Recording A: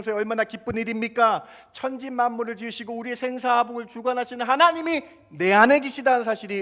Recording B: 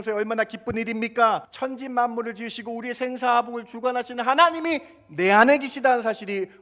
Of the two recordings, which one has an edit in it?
B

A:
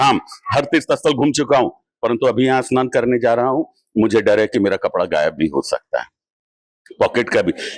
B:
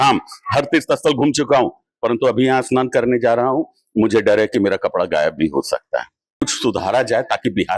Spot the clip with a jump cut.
B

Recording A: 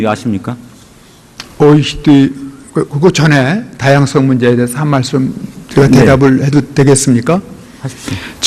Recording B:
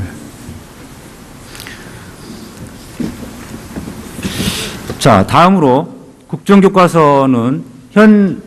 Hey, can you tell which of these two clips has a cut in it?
B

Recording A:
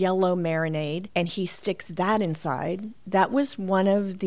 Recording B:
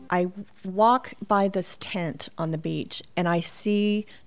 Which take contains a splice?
A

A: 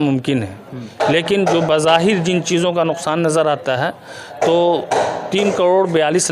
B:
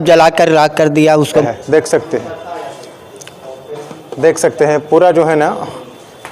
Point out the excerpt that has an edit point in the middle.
B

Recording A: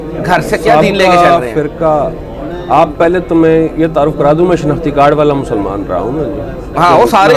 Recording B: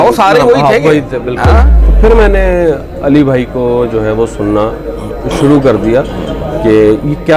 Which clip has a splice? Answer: B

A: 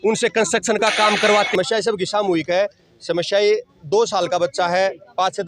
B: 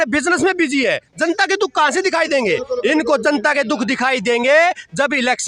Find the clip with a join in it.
A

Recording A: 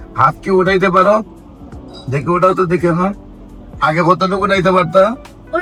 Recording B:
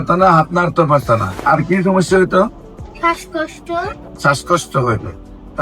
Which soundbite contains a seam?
B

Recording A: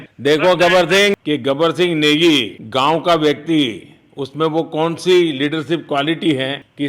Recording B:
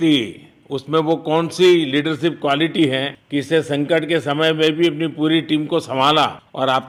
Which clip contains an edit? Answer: A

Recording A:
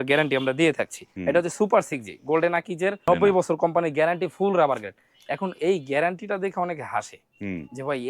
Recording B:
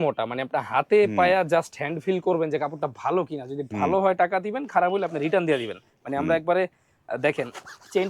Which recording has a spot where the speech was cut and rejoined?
A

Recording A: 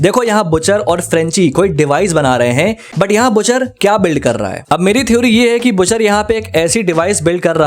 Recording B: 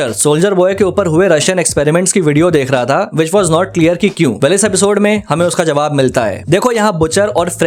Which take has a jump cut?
A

